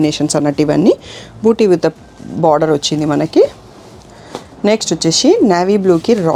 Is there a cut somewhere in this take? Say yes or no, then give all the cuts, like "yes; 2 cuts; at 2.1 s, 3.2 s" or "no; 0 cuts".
no; 0 cuts